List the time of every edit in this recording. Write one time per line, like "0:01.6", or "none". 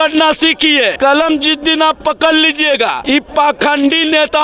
0:00.9
0:03.0